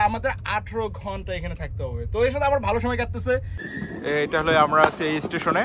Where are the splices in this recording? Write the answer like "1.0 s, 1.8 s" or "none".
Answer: 3.5 s

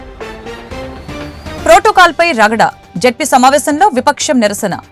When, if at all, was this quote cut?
1.6 s

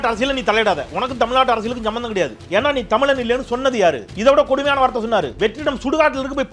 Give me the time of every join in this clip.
2.4 s, 4.1 s, 5.3 s

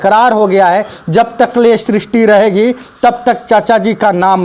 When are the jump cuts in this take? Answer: none

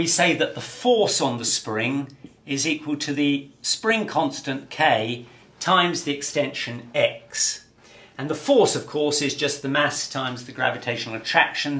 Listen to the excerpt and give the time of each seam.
1.5 s

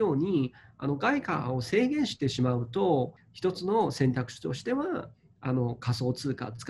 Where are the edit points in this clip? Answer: 3.2 s

